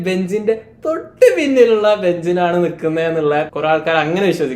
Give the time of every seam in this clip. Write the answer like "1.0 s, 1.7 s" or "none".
3.5 s